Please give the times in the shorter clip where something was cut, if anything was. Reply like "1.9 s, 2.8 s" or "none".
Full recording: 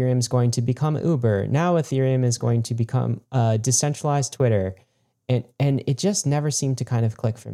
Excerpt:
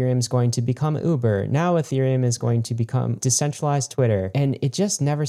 3.2 s, 4.3 s